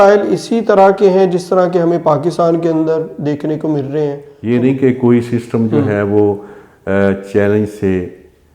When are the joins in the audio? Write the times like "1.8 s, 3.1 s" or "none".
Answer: 4.3 s